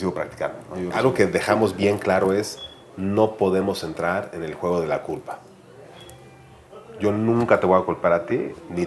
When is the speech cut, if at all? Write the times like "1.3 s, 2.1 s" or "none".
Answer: 0.9 s